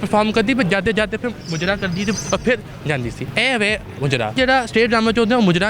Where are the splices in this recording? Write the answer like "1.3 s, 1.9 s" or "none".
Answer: 3.3 s, 4.4 s